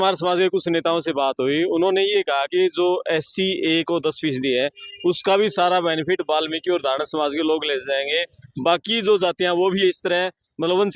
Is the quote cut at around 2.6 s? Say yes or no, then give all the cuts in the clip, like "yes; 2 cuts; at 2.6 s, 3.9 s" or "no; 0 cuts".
no; 0 cuts